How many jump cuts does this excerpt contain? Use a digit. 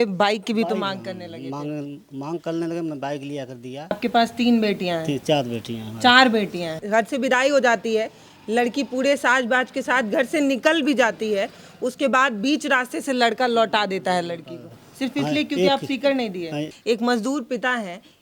3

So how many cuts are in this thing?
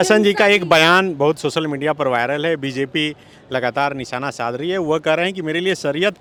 0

